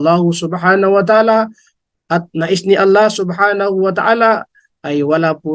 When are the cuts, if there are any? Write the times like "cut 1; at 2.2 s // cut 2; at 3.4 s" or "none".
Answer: none